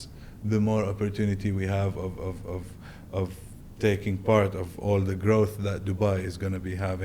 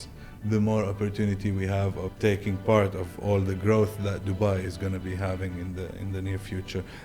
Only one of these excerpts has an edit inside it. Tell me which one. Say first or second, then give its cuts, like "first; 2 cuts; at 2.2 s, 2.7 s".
second; 1 cut; at 2.1 s